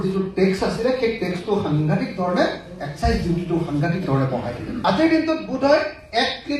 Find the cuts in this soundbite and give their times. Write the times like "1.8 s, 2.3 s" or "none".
4.8 s